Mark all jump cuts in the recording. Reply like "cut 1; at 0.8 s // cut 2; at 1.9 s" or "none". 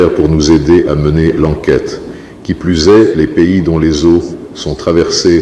cut 1; at 2.2 s